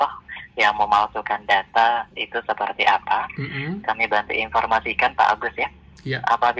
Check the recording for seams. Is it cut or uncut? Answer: uncut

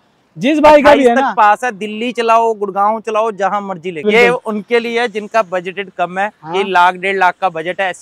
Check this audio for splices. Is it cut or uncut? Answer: cut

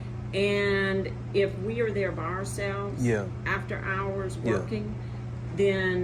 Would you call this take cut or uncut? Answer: uncut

